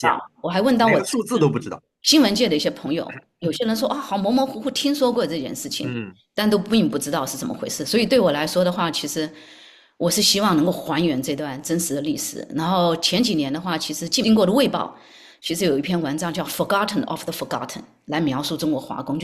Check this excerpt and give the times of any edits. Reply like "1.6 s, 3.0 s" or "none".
14.2 s